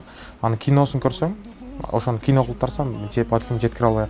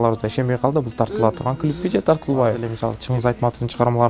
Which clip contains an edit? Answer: second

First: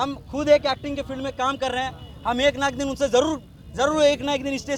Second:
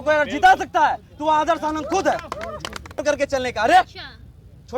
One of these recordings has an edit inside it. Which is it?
second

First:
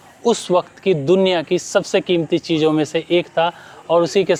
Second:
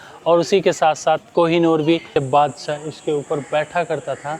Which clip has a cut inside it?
second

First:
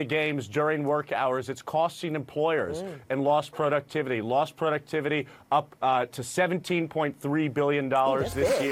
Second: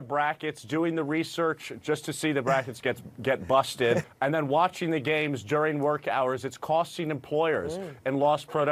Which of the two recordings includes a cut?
second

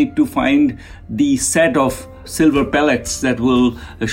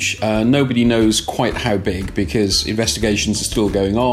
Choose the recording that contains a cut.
first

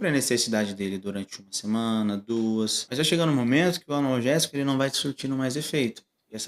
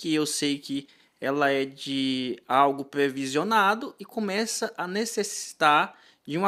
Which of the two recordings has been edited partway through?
first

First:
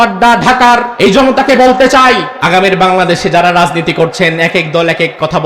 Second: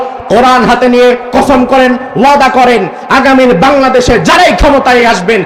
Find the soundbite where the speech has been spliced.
first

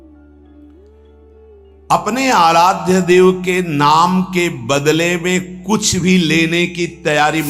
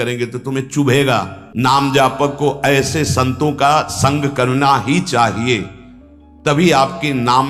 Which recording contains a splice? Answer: second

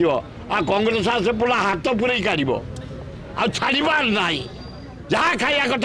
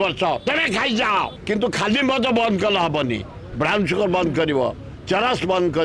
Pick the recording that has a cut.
second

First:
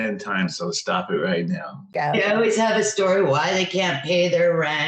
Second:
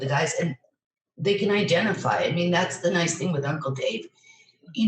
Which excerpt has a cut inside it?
first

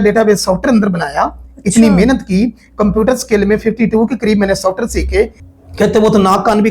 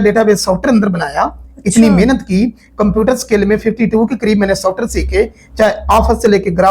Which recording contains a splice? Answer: first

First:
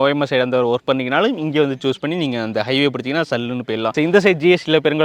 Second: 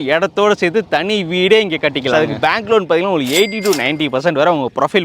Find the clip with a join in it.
second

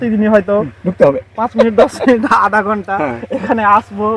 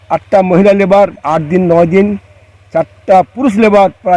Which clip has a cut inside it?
second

